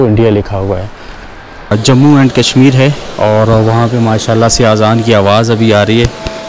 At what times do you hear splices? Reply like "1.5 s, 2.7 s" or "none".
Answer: 1.7 s